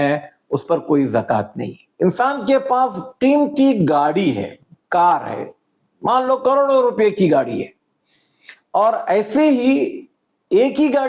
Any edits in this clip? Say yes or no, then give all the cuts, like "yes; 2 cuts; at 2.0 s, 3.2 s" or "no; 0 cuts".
yes; 1 cut; at 1.8 s